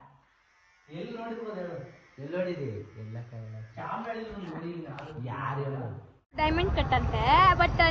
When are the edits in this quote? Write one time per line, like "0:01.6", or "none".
0:06.4